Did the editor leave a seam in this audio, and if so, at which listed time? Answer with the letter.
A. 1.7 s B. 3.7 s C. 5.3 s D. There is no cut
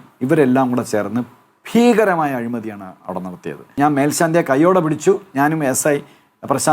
B